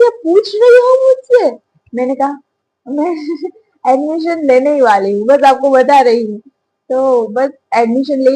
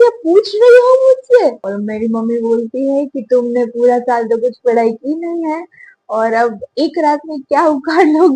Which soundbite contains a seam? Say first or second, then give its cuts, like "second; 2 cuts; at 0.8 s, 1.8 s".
second; 1 cut; at 1.6 s